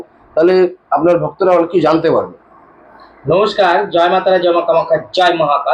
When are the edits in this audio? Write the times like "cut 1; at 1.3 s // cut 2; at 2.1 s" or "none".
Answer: none